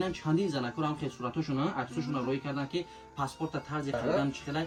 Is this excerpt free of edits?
yes; 0 cuts

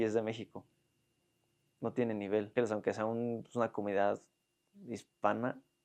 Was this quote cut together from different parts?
yes; 1 cut; at 2.5 s

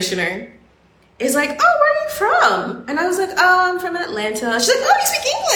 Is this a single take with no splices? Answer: yes; 0 cuts

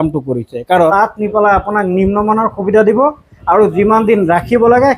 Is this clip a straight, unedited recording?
no; 1 cut; at 0.9 s

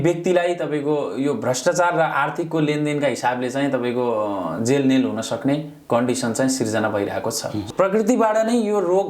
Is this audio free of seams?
no; 1 cut; at 7.7 s

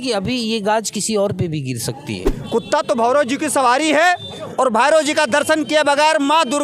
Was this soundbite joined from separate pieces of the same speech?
yes; 1 cut; at 2.2 s

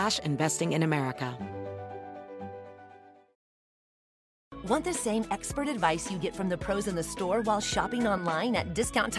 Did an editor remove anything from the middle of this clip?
yes; 1 cut; at 1.3 s

